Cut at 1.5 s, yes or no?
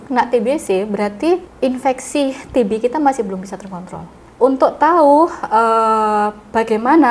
yes